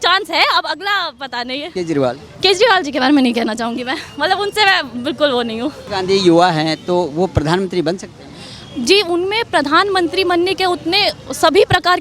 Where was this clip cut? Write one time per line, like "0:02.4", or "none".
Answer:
0:01.7
0:05.8